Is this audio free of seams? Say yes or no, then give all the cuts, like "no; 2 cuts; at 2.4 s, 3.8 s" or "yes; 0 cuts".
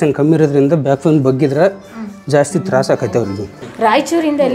no; 1 cut; at 3.6 s